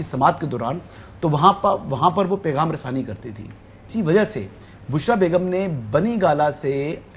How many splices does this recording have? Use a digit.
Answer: 1